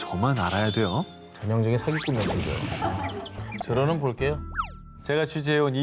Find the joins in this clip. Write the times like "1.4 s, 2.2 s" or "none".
3.6 s